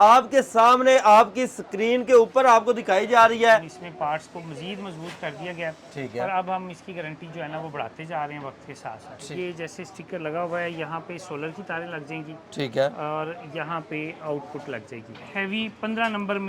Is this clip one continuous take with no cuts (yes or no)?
no